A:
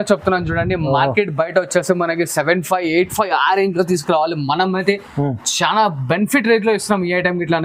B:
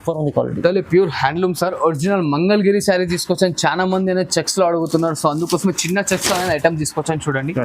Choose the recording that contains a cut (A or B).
B